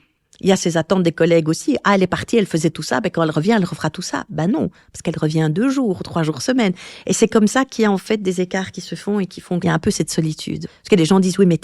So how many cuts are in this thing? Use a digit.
2